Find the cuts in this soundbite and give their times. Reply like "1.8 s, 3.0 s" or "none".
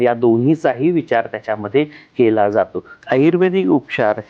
2.9 s